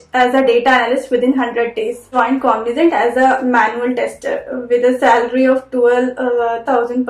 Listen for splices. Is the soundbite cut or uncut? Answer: cut